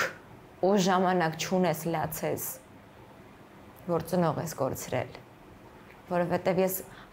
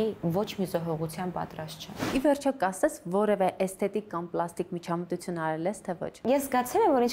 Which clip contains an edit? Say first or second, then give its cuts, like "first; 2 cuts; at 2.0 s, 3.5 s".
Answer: second; 2 cuts; at 1.9 s, 6.2 s